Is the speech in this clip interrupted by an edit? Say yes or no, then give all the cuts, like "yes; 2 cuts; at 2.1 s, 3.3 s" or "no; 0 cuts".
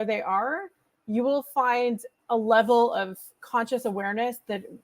yes; 1 cut; at 2.1 s